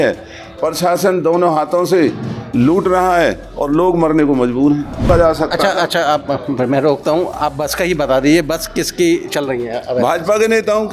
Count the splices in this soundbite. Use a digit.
1